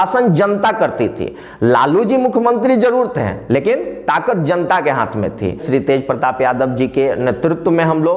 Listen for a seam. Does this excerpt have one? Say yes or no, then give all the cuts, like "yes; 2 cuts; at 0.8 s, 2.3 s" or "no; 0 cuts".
yes; 1 cut; at 5.6 s